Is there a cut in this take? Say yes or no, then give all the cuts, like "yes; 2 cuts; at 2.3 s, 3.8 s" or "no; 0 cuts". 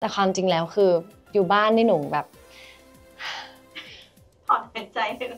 no; 0 cuts